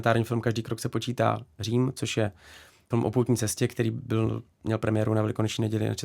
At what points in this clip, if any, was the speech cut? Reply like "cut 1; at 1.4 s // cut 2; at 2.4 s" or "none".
cut 1; at 2.9 s